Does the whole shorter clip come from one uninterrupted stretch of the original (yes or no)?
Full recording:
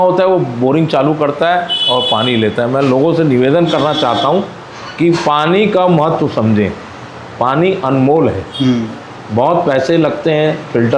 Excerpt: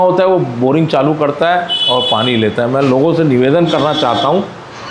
yes